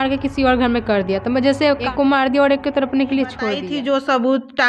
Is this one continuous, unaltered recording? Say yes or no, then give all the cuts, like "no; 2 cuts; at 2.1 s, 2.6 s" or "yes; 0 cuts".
no; 2 cuts; at 1.9 s, 3.6 s